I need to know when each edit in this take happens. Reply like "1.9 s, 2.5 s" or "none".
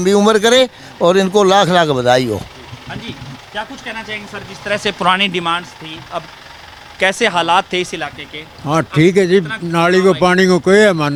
none